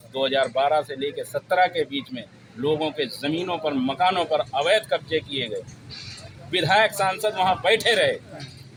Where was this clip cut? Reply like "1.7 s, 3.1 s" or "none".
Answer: none

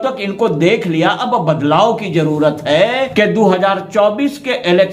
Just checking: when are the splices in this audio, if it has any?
3.1 s

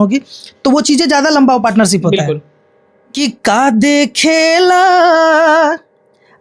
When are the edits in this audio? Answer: 3.1 s

